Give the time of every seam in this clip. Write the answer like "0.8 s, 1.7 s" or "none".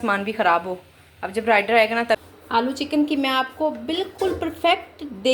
2.2 s